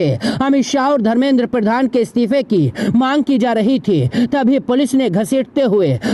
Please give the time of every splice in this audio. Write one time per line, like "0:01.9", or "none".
none

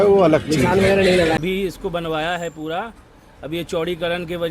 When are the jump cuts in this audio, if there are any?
0:01.4

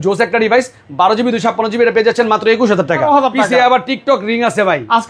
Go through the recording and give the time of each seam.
0:03.0

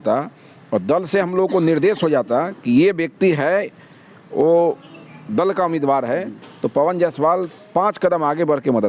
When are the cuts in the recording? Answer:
none

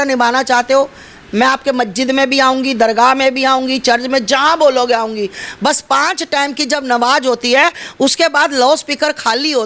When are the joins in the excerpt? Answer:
none

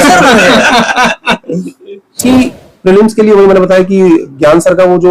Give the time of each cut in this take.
0:02.2

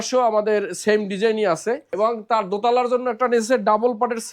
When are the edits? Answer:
0:01.9

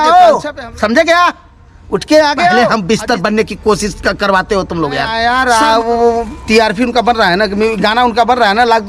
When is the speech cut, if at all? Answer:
0:02.6
0:05.1

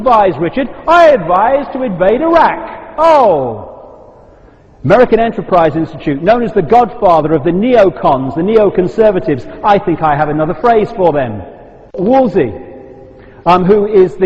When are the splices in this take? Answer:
0:09.9

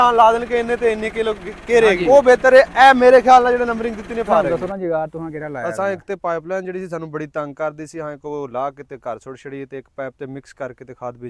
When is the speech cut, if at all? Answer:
0:02.0
0:04.5

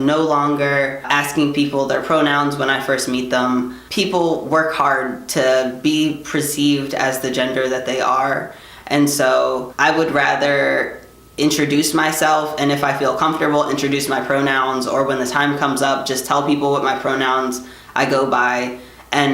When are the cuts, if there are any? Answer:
0:01.1
0:03.8
0:09.7

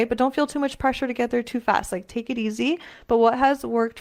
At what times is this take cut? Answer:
none

